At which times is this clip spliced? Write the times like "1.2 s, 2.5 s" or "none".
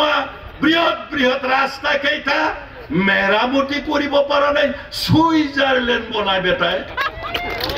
none